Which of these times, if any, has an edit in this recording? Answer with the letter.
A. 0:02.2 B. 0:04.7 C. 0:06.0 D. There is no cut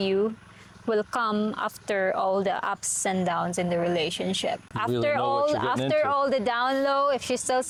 D